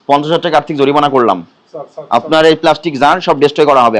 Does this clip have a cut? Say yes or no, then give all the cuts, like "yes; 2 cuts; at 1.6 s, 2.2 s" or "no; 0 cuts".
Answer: no; 0 cuts